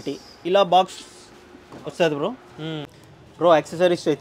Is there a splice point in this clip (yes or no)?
yes